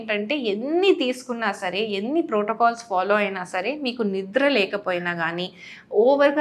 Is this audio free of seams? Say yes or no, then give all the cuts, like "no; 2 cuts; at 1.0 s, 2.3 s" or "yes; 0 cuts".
yes; 0 cuts